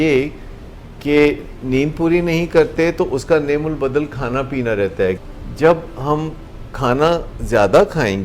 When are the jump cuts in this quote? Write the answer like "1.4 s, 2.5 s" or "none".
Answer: 5.3 s